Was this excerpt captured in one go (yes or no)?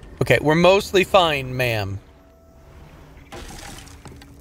no